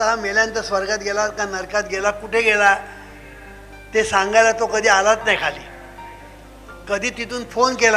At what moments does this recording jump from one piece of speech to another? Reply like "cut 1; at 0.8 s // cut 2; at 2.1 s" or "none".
none